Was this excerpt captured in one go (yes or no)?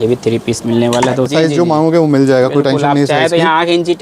no